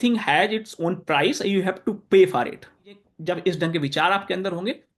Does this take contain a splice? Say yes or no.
yes